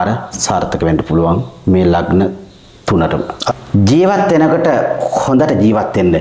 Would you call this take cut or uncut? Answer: cut